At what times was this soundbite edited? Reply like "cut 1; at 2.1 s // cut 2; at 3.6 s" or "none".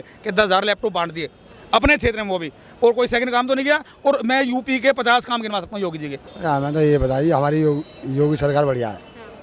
cut 1; at 6.2 s